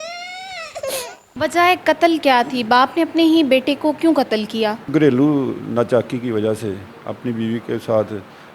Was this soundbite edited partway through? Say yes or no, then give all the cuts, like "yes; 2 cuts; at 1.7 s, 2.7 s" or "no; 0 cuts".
yes; 2 cuts; at 1.2 s, 4.9 s